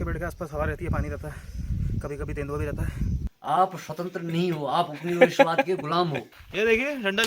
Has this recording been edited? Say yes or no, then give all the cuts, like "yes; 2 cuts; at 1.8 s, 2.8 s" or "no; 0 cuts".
yes; 2 cuts; at 3.4 s, 6.2 s